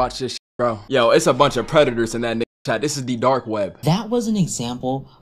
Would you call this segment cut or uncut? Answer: cut